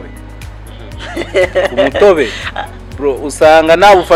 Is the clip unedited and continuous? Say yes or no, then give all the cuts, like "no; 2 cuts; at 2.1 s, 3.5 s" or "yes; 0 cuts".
yes; 0 cuts